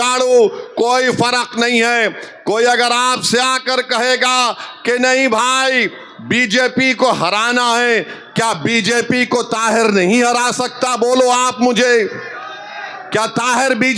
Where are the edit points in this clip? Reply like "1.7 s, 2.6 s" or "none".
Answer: none